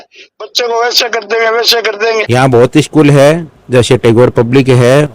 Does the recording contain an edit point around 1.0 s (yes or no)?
no